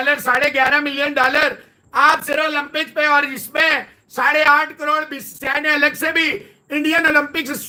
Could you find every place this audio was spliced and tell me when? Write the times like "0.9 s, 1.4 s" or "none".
none